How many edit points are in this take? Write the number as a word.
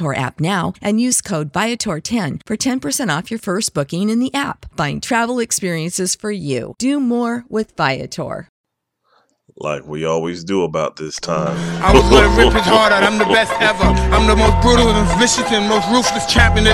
one